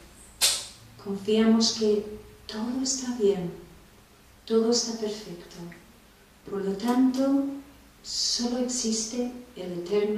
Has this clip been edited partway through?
yes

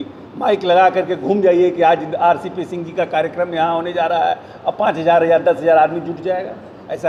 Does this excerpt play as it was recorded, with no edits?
yes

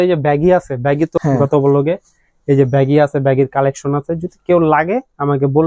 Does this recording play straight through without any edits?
no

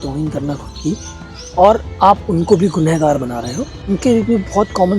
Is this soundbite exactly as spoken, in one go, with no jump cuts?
no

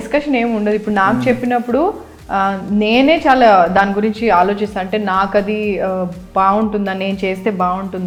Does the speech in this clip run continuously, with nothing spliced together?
yes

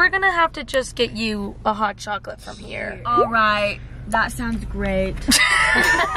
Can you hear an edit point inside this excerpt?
no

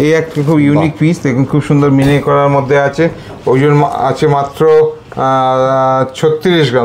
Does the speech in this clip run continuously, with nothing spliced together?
yes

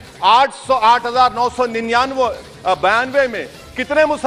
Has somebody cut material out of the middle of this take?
no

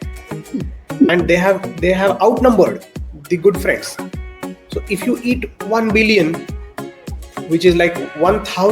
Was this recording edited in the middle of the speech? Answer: yes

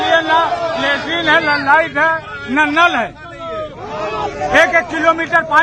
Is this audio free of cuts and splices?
yes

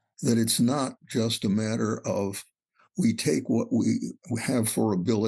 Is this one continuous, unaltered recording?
yes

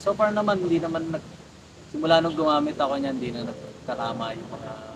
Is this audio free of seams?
yes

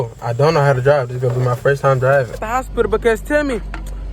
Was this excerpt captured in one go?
no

